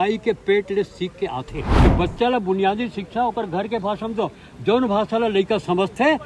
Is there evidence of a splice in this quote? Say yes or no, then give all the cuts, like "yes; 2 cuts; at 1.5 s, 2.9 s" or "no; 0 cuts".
yes; 1 cut; at 1.6 s